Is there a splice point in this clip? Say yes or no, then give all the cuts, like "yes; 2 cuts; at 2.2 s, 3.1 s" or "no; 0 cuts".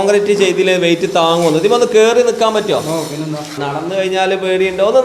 yes; 1 cut; at 3.6 s